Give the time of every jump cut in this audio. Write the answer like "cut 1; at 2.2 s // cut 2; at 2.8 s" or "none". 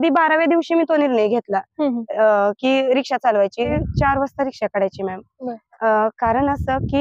cut 1; at 3.7 s